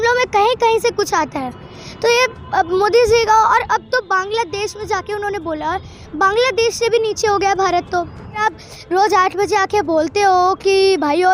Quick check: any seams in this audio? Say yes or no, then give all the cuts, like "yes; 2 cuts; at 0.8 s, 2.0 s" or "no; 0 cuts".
yes; 1 cut; at 8.4 s